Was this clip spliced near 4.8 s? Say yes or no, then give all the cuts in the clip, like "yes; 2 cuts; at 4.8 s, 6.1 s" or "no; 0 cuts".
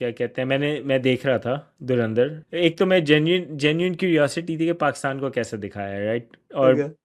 no; 1 cut; at 2.4 s